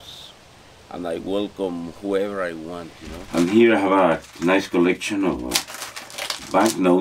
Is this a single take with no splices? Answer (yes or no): no